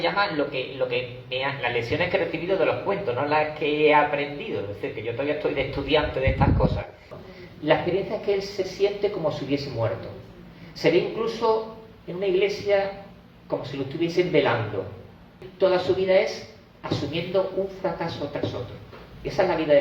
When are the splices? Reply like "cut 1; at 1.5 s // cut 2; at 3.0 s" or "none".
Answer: cut 1; at 7.1 s // cut 2; at 15.4 s